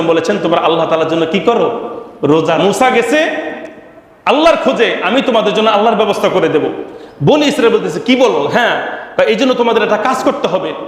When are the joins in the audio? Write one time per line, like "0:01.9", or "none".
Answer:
0:02.6